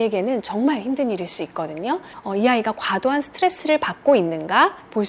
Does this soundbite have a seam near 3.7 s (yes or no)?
no